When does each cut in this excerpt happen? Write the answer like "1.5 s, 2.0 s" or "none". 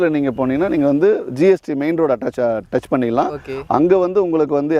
none